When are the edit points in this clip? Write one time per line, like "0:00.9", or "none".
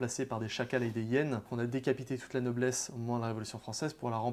0:01.5